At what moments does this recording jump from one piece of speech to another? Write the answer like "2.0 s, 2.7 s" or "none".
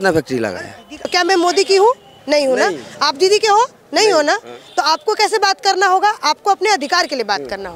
0.9 s